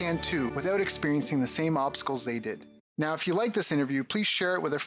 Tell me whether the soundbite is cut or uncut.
cut